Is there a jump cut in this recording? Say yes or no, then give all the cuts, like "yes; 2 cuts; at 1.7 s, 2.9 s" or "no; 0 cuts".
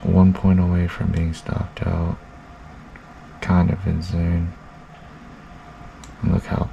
no; 0 cuts